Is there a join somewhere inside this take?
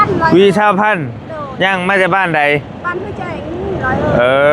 no; 0 cuts

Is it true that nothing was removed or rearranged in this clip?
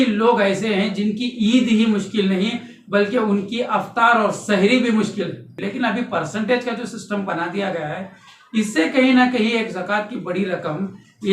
no; 1 cut; at 5.5 s

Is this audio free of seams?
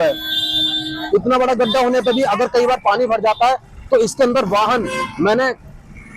yes; 0 cuts

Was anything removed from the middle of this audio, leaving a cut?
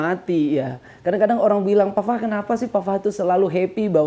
no; 0 cuts

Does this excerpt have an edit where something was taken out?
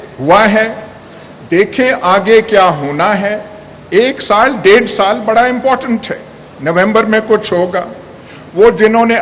no; 0 cuts

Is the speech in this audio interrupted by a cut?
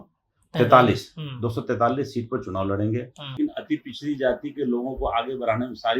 yes; 1 cut; at 3.3 s

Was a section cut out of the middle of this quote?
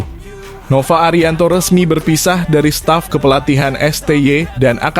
no; 0 cuts

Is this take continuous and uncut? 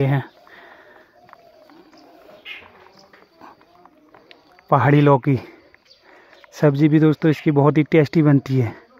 yes; 0 cuts

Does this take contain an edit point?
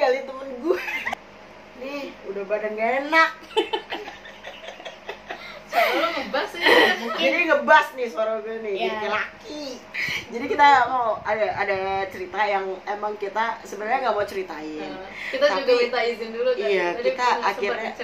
yes; 2 cuts; at 1.1 s, 9.8 s

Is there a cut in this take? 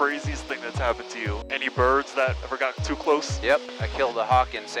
yes; 3 cuts; at 1.4 s, 2.4 s, 3.7 s

